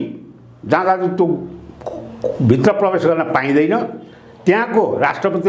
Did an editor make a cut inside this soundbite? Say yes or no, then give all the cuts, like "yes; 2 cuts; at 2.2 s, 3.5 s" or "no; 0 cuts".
no; 0 cuts